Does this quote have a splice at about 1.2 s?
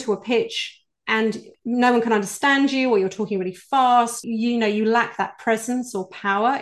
yes; 1 cut; at 1.2 s

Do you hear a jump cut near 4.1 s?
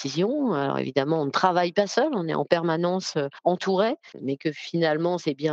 yes; 2 cuts; at 3.3 s, 4.1 s

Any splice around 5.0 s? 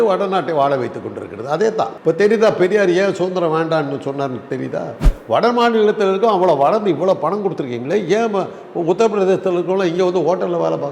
yes; 1 cut; at 5.0 s

